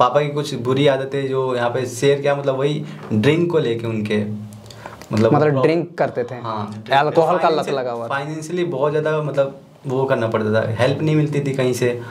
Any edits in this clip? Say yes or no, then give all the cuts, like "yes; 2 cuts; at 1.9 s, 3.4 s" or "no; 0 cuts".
no; 0 cuts